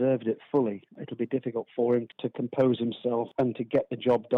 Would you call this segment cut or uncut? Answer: cut